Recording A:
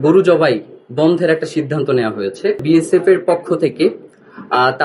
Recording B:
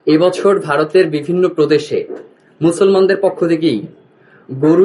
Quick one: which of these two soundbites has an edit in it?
A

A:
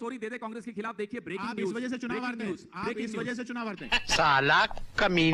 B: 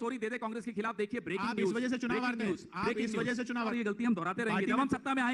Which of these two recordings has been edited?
B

